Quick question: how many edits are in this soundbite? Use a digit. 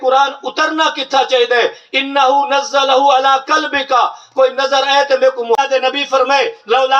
1